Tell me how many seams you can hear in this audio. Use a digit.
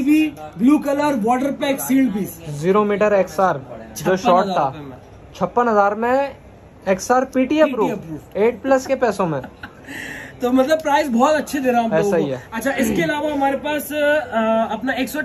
0